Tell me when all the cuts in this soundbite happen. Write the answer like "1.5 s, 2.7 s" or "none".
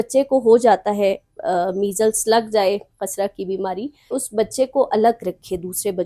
4.2 s